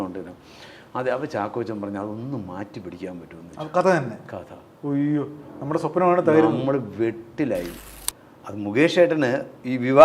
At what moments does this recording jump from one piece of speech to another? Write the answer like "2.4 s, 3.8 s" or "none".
7.8 s